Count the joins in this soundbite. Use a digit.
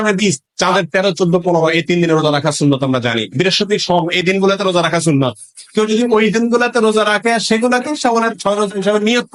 0